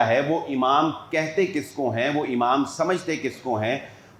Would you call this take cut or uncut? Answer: uncut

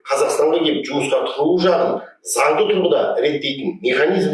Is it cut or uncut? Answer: uncut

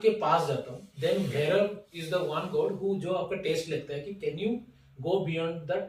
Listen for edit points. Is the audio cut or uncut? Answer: uncut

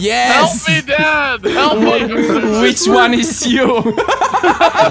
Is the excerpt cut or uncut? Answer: uncut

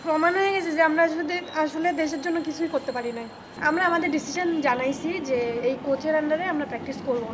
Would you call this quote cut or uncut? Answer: cut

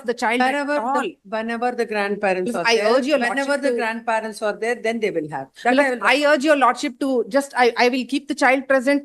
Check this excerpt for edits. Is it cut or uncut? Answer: uncut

